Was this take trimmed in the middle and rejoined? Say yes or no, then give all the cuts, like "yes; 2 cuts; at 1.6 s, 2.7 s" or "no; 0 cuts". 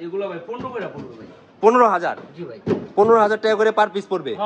no; 0 cuts